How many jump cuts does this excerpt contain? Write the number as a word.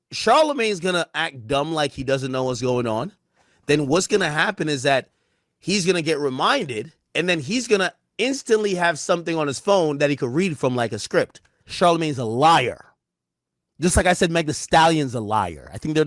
one